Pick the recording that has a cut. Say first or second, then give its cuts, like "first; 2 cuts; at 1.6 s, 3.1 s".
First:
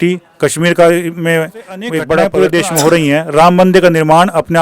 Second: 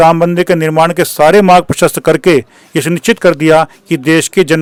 first; 1 cut; at 2.2 s